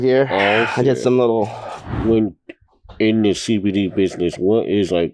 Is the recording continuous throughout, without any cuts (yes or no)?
no